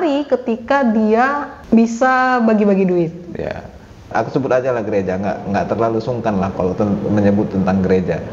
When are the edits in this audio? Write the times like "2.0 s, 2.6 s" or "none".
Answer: 1.5 s, 4.1 s